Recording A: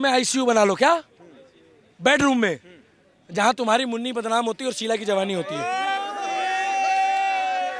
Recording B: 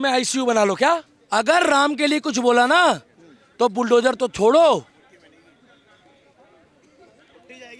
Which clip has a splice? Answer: B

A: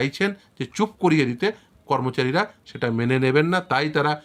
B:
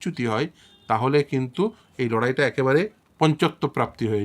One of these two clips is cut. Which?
B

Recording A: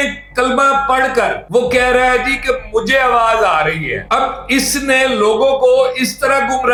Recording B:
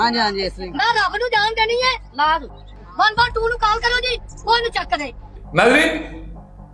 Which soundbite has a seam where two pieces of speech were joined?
B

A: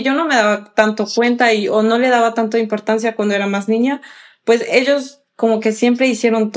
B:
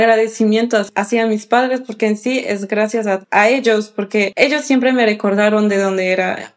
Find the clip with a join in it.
B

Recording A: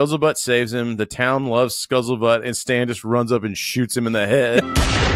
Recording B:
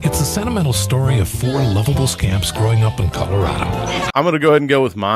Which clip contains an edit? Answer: B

